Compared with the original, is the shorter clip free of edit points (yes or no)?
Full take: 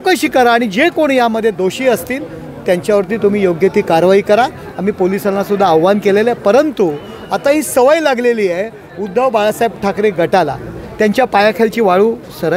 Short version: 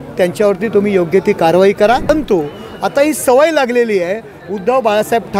no